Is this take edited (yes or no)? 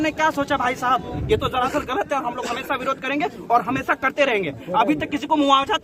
yes